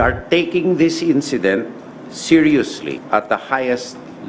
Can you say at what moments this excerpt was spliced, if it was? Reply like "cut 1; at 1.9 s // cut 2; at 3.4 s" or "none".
cut 1; at 3.0 s